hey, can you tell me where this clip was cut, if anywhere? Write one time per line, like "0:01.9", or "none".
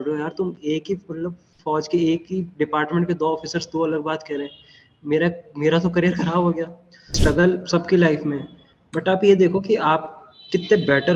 0:07.2